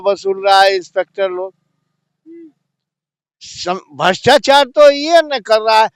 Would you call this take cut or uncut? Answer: uncut